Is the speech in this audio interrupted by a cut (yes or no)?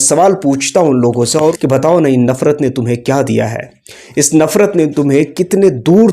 yes